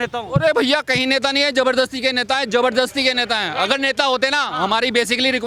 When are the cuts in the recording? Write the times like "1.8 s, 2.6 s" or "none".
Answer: none